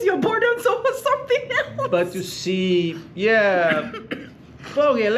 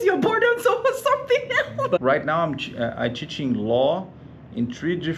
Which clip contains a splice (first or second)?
second